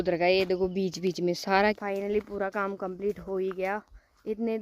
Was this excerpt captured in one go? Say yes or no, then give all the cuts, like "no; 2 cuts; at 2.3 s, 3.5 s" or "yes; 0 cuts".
no; 1 cut; at 1.8 s